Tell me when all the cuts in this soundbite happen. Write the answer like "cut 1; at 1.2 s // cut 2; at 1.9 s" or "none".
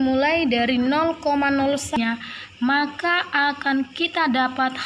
cut 1; at 2.0 s